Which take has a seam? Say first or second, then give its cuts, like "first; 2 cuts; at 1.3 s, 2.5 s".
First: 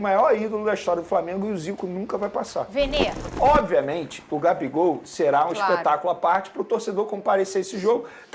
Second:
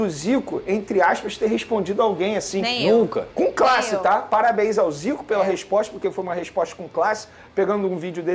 first; 1 cut; at 3.2 s